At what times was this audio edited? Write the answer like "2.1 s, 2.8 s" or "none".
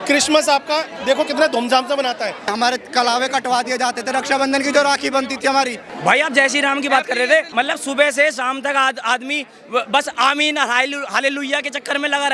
2.5 s, 5.8 s, 7.5 s

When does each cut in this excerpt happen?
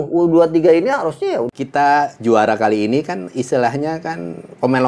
1.5 s

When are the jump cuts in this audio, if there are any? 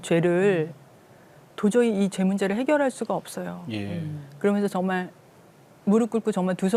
none

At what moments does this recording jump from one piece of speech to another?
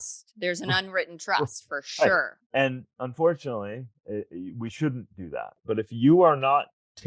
2.6 s, 4.0 s, 5.6 s

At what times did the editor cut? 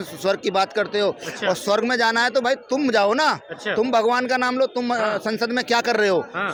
none

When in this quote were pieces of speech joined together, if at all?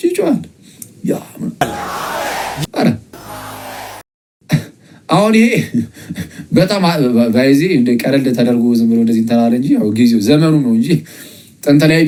none

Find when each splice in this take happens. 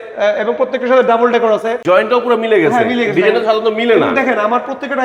1.8 s

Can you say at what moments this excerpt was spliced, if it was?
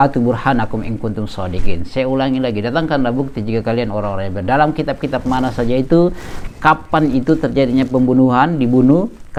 none

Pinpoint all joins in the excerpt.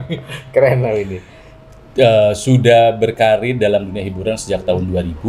none

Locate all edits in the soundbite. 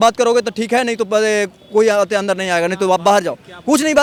none

